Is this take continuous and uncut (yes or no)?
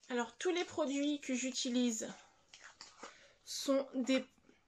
yes